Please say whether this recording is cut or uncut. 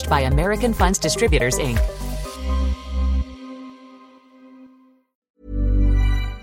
cut